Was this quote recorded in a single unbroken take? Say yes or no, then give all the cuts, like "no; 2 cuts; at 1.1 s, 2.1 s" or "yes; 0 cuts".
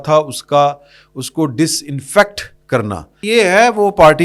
no; 1 cut; at 3.2 s